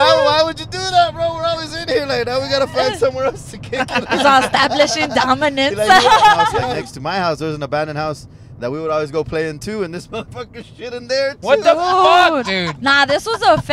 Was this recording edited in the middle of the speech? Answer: yes; 1 cut; at 6.7 s

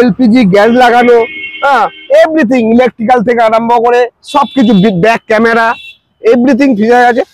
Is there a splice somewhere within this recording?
no; 0 cuts

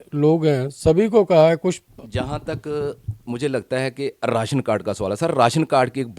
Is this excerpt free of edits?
no; 1 cut; at 1.9 s

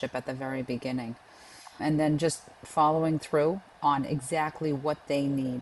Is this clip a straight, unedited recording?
yes; 0 cuts

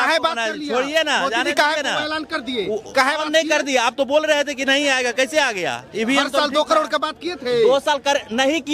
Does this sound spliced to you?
no; 0 cuts

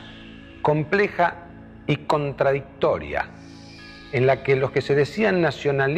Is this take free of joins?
yes; 0 cuts

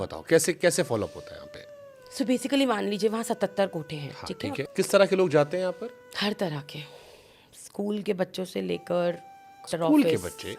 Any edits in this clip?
yes; 2 cuts; at 4.6 s, 9.6 s

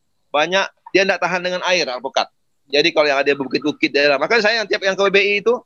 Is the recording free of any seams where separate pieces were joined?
yes; 0 cuts

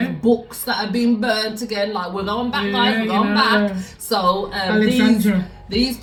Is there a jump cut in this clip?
no; 0 cuts

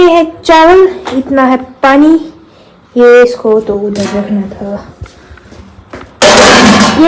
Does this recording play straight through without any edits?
yes; 0 cuts

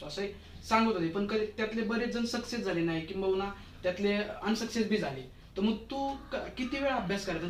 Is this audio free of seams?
yes; 0 cuts

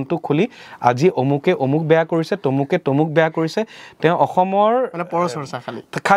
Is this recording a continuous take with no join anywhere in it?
yes; 0 cuts

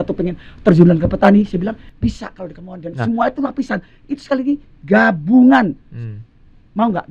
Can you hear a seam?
no; 0 cuts

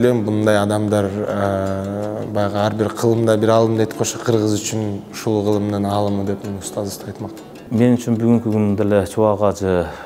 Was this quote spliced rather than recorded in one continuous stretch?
yes; 1 cut; at 7.7 s

